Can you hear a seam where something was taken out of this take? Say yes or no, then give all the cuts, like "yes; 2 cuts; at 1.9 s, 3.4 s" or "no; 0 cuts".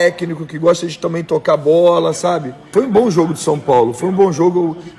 yes; 1 cut; at 2.7 s